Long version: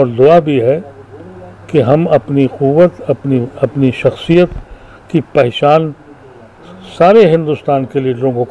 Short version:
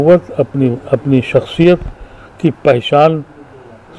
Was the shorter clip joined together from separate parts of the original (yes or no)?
no